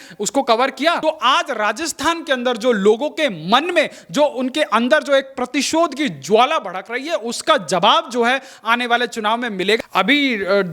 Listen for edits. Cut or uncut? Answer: cut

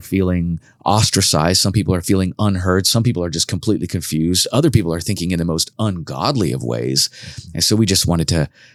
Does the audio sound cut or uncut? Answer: uncut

